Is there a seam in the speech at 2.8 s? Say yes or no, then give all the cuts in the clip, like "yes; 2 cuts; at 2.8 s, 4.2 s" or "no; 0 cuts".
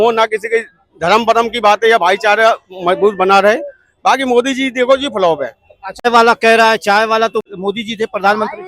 no; 2 cuts; at 6.0 s, 7.4 s